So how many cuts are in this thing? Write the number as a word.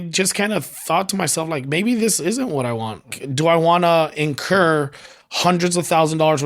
one